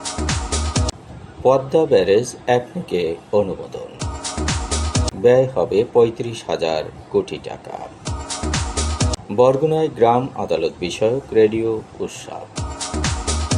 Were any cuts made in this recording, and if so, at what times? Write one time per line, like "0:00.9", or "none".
0:00.9